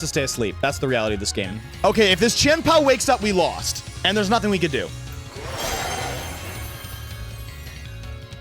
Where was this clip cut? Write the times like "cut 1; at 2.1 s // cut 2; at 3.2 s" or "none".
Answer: cut 1; at 1.6 s